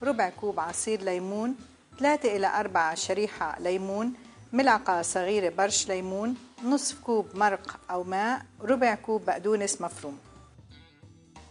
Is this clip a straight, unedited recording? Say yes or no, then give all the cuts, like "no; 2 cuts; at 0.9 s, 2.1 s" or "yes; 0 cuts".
no; 1 cut; at 10.2 s